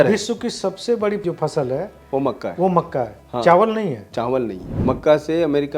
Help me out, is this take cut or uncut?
cut